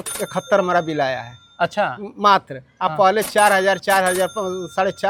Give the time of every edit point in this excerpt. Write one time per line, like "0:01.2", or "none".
none